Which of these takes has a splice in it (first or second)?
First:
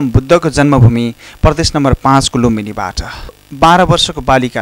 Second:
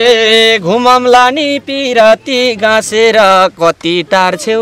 first